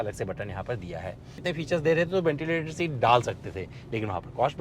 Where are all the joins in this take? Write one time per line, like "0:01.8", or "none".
0:01.4

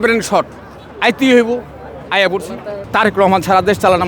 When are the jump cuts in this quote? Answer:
0:02.8

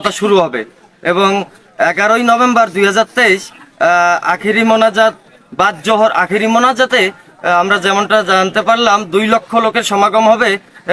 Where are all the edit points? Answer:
none

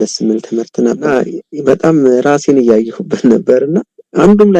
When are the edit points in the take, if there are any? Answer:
0:01.1

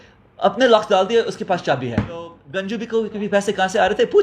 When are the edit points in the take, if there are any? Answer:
0:02.5

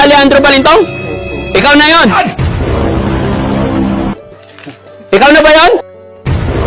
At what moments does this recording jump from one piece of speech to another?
0:02.1

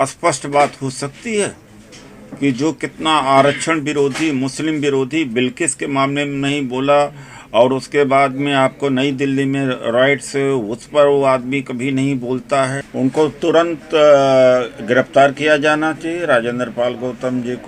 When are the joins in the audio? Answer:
0:12.8

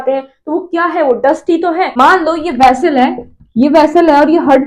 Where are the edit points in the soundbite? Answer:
0:01.9

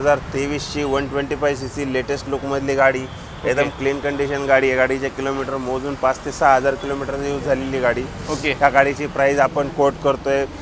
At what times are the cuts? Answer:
none

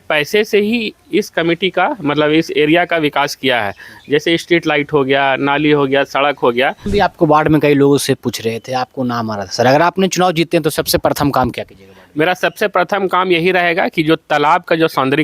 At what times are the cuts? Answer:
0:06.9

